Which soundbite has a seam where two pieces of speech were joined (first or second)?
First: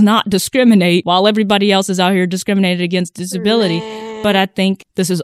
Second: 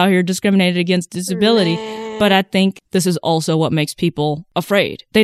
first